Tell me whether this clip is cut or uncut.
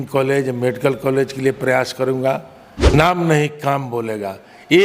cut